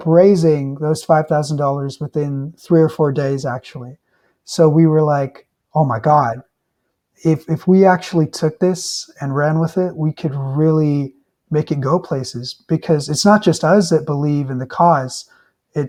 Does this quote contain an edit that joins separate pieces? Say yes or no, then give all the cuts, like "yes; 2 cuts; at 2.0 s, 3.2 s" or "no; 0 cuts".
no; 0 cuts